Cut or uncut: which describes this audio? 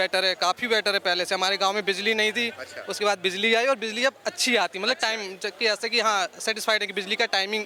uncut